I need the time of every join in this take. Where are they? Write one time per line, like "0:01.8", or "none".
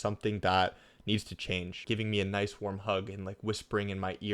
0:01.8

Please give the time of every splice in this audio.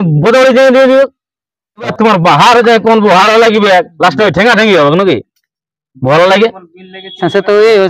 0:01.9

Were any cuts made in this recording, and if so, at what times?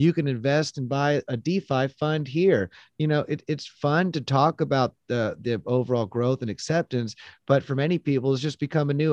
0:01.3

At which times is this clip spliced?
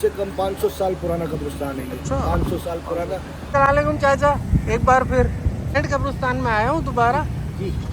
0:03.5
0:05.7

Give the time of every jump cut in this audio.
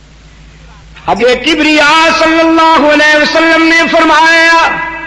0:01.2

